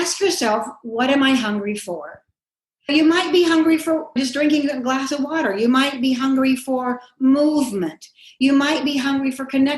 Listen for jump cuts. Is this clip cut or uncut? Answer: cut